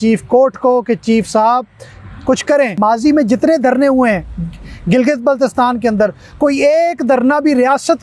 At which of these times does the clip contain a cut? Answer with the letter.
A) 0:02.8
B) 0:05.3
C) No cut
A